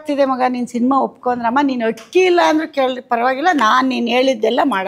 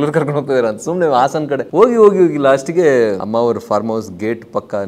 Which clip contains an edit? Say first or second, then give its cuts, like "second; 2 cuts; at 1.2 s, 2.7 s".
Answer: second; 2 cuts; at 1.7 s, 3.2 s